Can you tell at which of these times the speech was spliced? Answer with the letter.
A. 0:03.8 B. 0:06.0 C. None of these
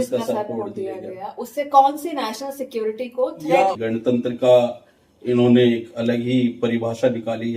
A